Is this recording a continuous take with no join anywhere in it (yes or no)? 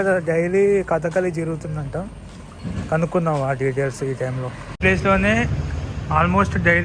no